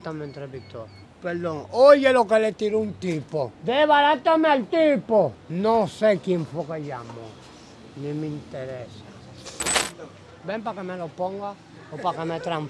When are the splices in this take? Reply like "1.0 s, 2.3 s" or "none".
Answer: 1.0 s, 3.5 s, 5.4 s, 9.7 s